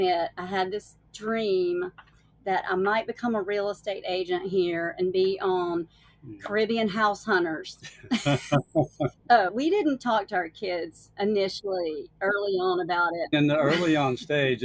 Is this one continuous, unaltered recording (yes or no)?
no